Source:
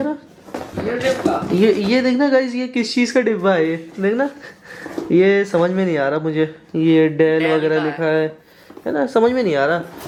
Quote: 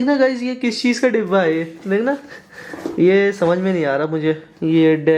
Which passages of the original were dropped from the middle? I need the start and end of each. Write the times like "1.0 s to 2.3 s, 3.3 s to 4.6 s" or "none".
none